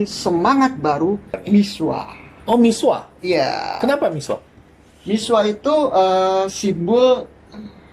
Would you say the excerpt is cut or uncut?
cut